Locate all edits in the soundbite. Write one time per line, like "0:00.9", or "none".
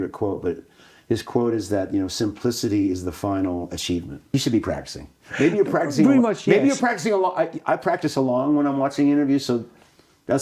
0:04.3